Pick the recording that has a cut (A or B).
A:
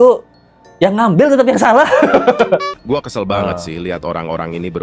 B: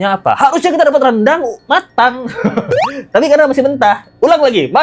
A